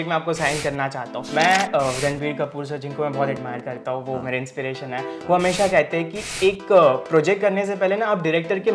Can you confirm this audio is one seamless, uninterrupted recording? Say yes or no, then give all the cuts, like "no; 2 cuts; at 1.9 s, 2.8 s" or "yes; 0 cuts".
no; 1 cut; at 1.2 s